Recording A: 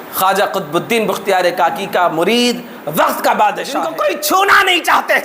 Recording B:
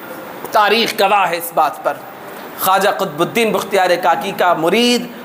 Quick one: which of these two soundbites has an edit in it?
A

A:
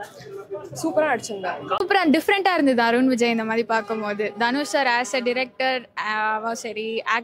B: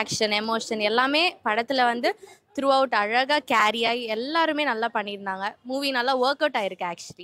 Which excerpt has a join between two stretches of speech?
A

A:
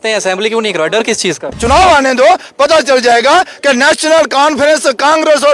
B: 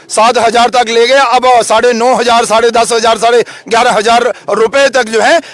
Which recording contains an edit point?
A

